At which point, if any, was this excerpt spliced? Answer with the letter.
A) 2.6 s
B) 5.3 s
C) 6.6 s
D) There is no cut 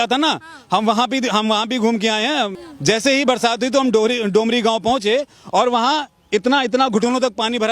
A